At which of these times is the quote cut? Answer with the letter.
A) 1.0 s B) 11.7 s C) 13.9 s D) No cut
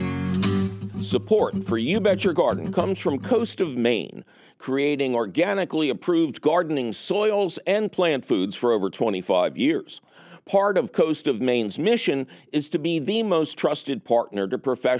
A